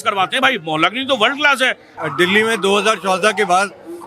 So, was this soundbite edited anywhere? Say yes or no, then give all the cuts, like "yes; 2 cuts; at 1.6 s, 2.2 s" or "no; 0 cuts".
yes; 1 cut; at 2.0 s